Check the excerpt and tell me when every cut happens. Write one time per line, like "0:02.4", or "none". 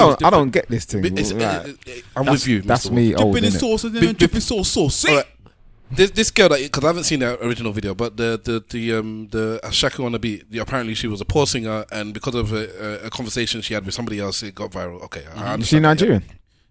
none